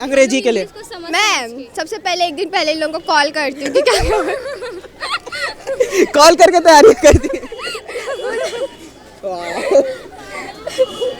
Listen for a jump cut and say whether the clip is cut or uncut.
uncut